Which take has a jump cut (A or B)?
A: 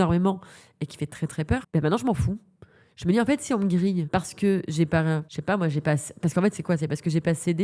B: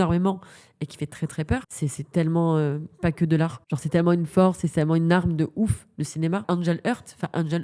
B